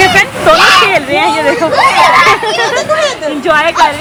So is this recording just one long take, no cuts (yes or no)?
yes